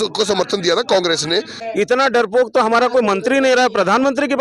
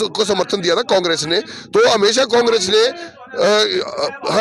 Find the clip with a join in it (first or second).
first